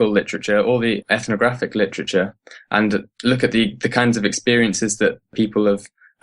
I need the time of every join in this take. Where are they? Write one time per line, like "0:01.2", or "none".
0:01.0
0:05.3